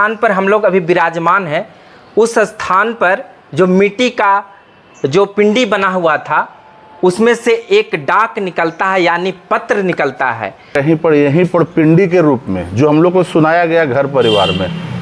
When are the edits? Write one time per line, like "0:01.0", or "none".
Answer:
0:10.7

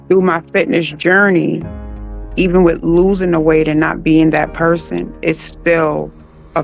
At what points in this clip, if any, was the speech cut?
none

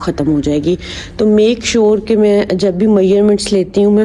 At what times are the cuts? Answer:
none

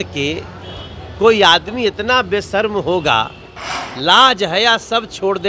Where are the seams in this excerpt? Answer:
none

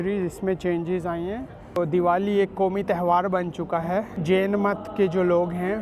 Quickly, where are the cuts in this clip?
0:01.8
0:04.1

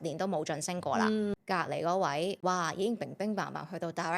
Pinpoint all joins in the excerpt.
0:01.3
0:02.4

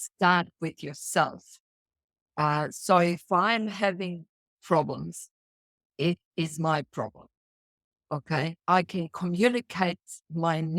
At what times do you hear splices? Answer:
none

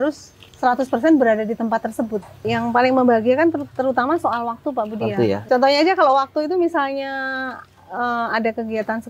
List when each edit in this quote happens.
0:02.4
0:05.4

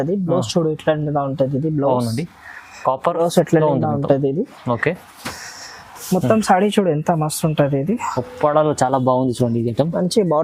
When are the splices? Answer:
none

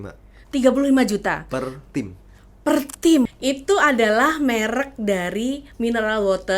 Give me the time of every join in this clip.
0:03.3

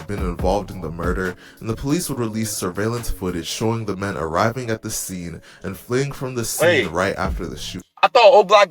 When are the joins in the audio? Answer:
none

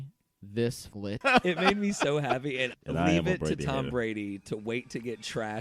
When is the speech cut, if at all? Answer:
0:01.2
0:02.8

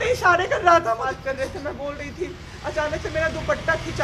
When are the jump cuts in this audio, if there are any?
0:01.0

